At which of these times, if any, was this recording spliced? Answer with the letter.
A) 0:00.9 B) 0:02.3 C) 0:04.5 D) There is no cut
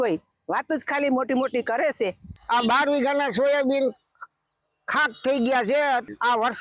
D